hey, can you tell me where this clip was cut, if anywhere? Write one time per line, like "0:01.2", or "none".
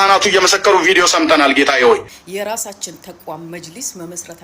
0:02.1

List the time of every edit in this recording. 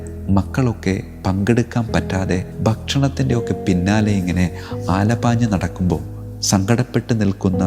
0:02.5

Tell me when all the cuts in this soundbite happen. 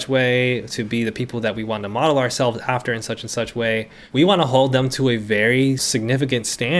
0:05.8

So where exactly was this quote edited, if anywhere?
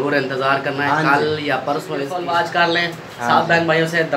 0:02.1

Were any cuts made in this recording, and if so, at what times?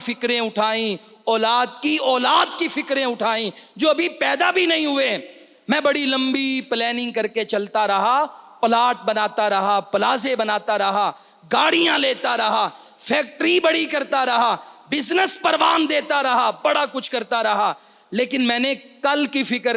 none

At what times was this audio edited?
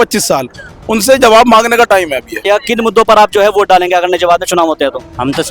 0:02.4

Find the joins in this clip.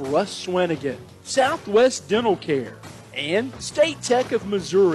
none

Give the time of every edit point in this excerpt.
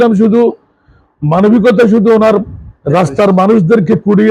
none

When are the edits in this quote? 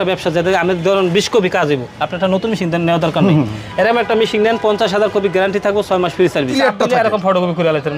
0:06.5

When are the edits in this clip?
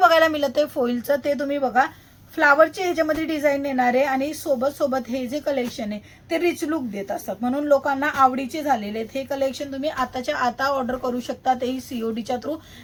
none

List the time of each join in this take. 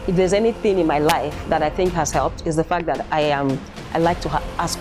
none

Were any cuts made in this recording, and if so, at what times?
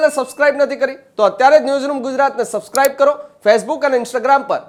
none

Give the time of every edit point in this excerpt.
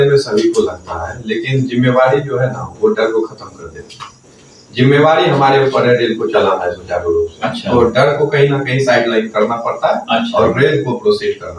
none

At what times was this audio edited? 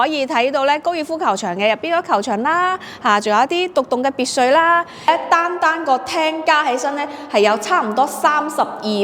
0:05.1

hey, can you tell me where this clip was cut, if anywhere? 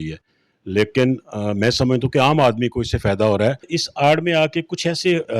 0:03.7

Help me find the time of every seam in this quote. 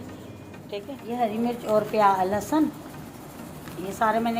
0:00.9

